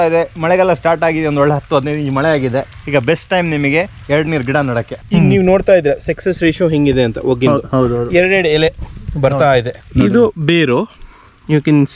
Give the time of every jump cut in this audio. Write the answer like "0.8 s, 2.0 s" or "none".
5.0 s, 9.8 s